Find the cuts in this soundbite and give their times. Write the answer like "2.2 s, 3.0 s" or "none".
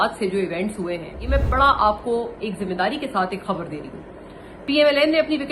1.1 s